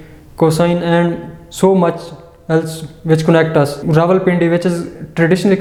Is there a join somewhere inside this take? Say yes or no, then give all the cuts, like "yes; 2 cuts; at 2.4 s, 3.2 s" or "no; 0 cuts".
no; 0 cuts